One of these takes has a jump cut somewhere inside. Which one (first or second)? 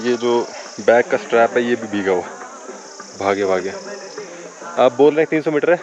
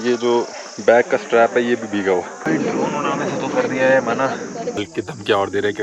second